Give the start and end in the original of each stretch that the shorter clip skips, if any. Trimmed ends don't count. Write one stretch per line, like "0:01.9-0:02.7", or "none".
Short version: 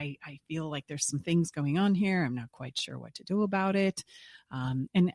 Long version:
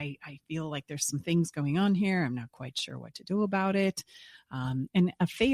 none